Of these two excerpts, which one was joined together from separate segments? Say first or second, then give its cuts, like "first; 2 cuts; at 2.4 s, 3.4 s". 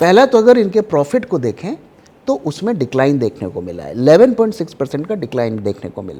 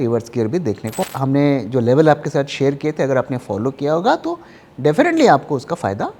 second; 1 cut; at 1.0 s